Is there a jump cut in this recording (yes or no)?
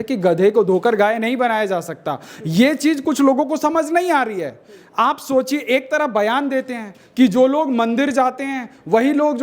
no